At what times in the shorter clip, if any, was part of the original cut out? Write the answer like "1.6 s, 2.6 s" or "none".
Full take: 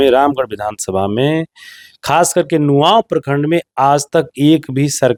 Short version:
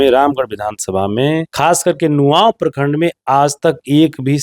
1.5 s